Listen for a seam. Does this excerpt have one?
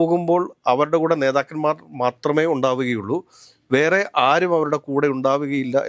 no; 0 cuts

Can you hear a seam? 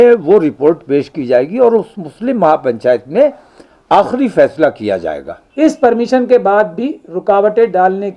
yes; 1 cut; at 5.4 s

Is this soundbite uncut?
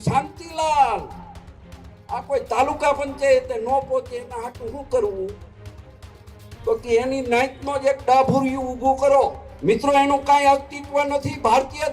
no; 1 cut; at 9.5 s

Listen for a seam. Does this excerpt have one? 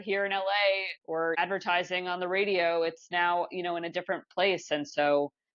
yes; 1 cut; at 1.1 s

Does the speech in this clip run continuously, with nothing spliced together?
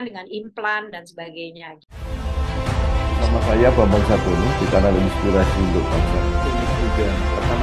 no; 1 cut; at 1.7 s

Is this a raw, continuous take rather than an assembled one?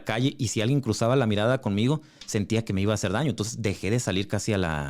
yes; 0 cuts

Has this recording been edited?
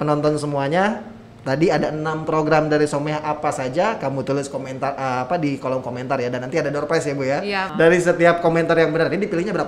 yes; 1 cut; at 7.6 s

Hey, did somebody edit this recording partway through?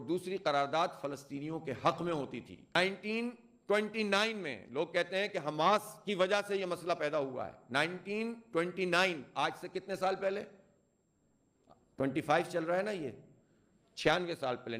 yes; 1 cut; at 2.8 s

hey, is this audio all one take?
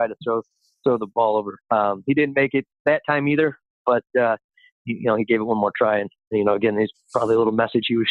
yes; 0 cuts

